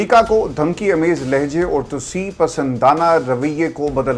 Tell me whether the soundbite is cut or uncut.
uncut